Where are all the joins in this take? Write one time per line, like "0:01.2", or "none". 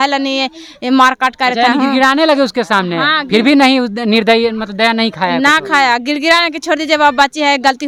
none